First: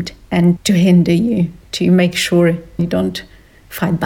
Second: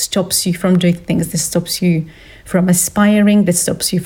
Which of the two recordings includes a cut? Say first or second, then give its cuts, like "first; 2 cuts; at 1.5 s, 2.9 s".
first; 1 cut; at 2.8 s